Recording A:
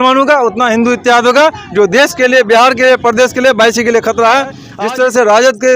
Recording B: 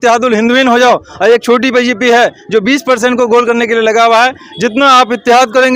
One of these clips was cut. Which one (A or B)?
A